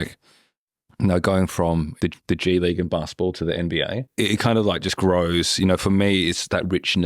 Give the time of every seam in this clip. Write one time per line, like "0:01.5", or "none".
0:02.0
0:04.1